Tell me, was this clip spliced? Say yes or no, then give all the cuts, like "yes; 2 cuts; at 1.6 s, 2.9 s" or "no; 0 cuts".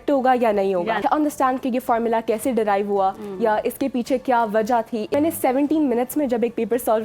yes; 2 cuts; at 1.0 s, 5.1 s